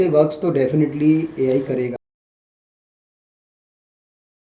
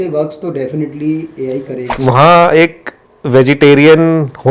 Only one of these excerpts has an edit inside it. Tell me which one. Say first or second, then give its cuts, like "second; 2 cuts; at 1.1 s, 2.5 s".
second; 1 cut; at 1.8 s